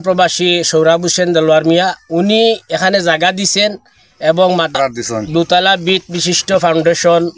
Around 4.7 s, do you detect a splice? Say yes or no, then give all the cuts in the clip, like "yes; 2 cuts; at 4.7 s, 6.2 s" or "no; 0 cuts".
yes; 1 cut; at 4.7 s